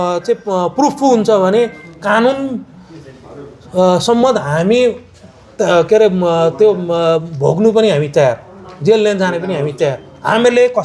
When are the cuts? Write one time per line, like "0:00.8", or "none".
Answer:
none